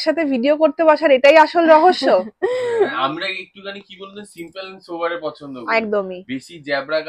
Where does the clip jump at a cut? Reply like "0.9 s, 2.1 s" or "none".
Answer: none